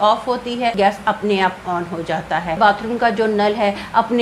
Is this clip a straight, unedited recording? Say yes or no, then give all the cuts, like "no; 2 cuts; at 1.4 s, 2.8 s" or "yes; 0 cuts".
no; 2 cuts; at 0.7 s, 2.6 s